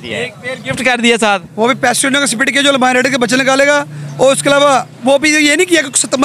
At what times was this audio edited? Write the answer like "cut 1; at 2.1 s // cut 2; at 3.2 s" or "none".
none